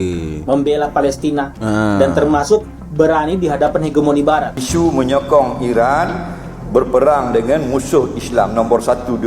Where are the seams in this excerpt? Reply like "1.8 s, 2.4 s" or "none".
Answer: 4.6 s